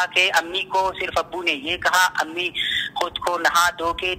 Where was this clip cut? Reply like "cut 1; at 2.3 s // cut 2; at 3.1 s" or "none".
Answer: none

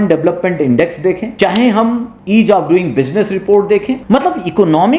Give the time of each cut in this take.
cut 1; at 1.3 s // cut 2; at 2.1 s // cut 3; at 4.0 s

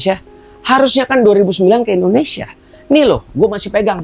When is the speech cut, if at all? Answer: none

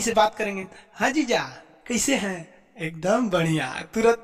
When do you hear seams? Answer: none

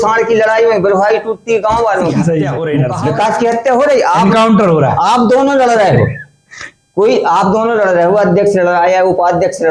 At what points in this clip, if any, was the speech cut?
cut 1; at 2.6 s

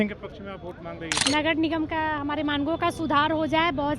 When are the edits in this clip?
cut 1; at 1.1 s

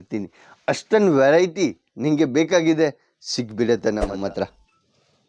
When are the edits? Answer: cut 1; at 4.1 s

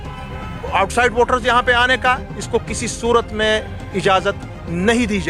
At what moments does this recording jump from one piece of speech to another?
none

